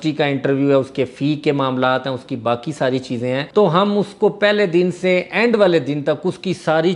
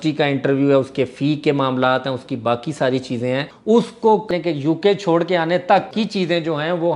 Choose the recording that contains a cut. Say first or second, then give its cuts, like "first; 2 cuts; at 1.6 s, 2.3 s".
second; 3 cuts; at 3.5 s, 4.3 s, 5.9 s